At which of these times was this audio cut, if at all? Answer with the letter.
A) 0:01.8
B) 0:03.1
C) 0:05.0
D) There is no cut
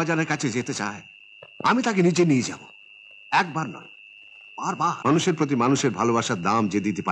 C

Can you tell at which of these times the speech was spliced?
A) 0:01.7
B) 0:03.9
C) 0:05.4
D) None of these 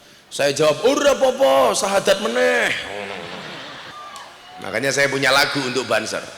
B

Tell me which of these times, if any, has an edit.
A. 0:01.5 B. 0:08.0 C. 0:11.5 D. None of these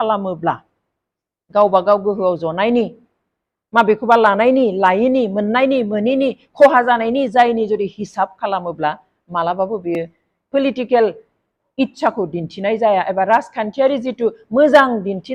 D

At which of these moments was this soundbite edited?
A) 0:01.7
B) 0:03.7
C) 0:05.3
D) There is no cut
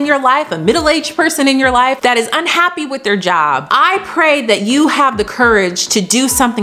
B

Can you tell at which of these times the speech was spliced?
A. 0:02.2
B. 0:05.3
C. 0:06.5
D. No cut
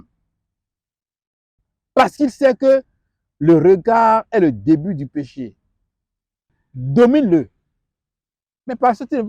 C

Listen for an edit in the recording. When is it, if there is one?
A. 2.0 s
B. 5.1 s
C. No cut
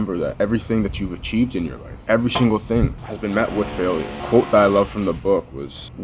C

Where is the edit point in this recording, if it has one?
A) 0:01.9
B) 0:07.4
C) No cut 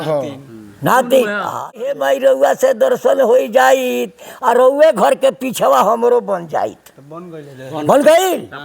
A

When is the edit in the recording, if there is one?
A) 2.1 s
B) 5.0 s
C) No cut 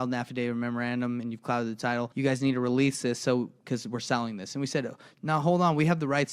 A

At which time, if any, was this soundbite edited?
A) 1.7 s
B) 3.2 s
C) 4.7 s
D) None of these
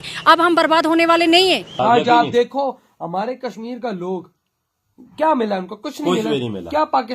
A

